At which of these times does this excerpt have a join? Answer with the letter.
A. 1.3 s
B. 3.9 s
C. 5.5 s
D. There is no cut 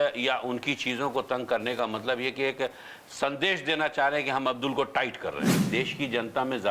C